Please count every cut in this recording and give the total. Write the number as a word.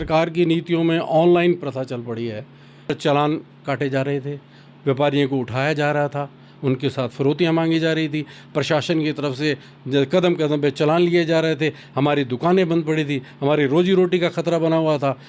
one